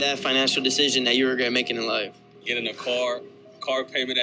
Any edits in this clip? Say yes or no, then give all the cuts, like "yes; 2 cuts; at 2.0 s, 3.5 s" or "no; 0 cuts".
no; 0 cuts